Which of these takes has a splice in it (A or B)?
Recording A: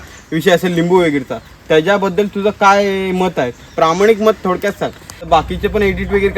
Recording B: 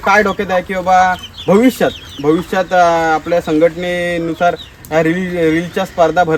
A